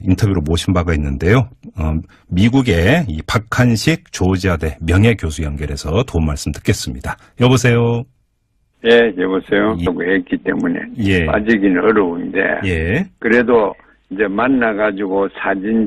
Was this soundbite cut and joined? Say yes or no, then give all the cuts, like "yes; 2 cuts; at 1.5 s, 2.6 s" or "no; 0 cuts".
no; 0 cuts